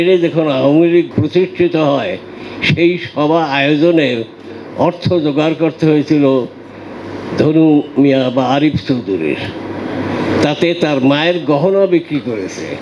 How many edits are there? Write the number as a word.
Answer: one